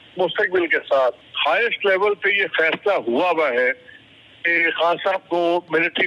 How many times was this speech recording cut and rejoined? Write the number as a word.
one